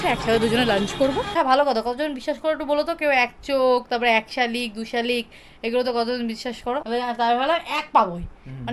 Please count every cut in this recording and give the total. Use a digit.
2